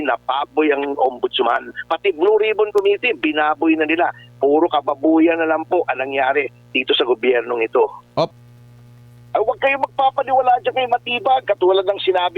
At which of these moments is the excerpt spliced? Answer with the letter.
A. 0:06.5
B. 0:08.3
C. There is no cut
B